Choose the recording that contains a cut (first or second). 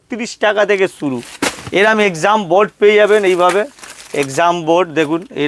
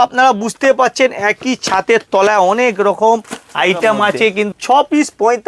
second